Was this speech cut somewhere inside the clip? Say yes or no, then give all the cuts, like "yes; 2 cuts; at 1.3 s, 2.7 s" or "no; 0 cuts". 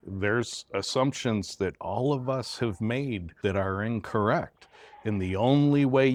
no; 0 cuts